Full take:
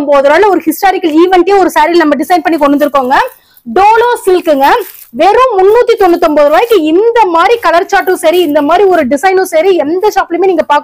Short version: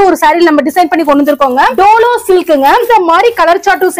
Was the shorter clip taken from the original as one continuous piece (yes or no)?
no